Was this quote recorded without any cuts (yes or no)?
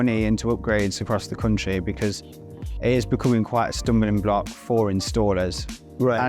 yes